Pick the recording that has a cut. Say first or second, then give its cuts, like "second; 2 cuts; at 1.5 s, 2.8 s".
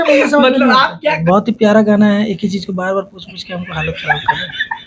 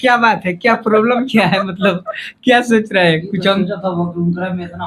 first; 1 cut; at 1.2 s